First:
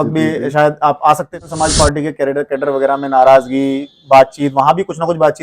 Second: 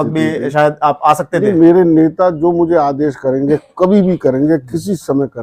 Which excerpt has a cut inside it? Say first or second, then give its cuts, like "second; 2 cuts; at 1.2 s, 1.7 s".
first; 1 cut; at 1.4 s